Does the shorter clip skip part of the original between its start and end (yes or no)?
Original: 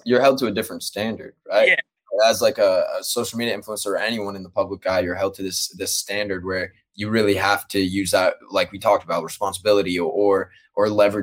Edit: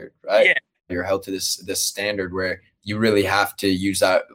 yes